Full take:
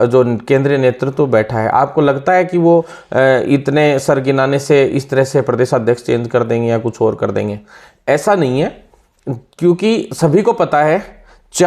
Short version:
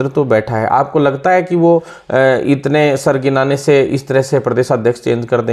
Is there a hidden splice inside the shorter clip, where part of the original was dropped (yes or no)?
no